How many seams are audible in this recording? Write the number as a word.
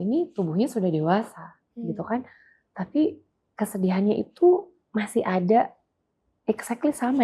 zero